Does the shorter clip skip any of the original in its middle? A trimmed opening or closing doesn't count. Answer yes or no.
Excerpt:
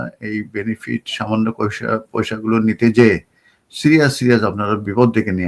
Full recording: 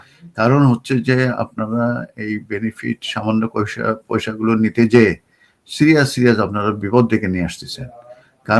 no